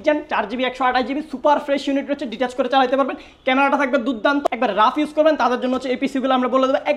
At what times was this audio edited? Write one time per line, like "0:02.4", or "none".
0:04.4

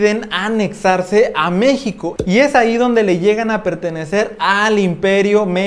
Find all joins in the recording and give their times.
none

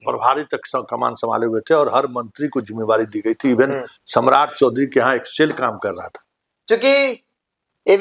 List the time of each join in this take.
0:06.2

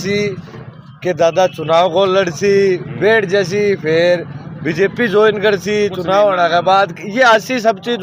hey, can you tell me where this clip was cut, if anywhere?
none

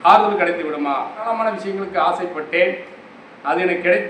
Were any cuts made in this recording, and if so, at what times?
0:01.3

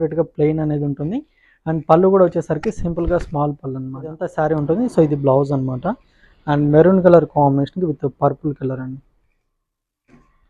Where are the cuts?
0:04.3

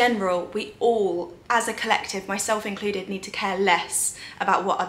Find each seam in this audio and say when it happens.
none

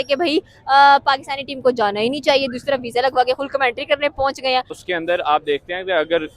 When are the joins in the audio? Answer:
0:04.8

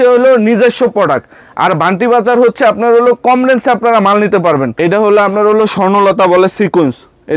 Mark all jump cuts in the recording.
0:04.7

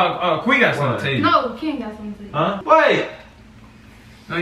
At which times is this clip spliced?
0:02.6

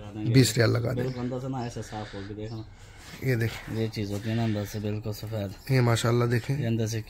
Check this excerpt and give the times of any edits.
none

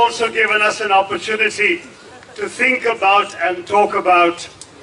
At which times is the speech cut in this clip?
none

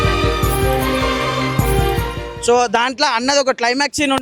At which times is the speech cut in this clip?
0:02.3

